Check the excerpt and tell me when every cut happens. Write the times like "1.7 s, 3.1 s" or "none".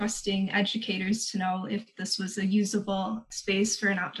3.3 s